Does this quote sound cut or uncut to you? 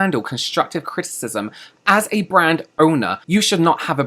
cut